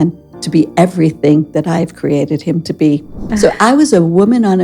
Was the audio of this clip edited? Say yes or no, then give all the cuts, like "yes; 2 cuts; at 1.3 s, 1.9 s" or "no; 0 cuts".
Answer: yes; 1 cut; at 3.3 s